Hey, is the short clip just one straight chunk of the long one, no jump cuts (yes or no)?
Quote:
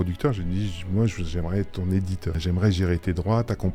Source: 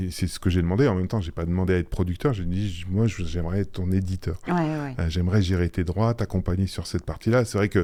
no